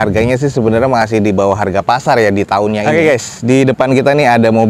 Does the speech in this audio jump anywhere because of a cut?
yes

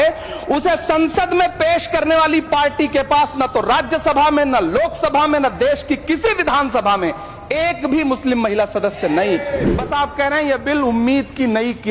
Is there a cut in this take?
yes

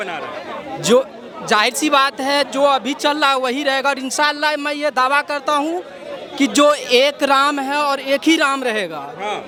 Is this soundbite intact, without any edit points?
yes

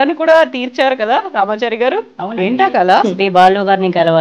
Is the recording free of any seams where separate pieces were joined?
no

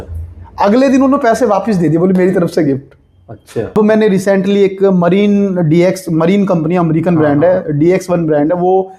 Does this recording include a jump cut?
yes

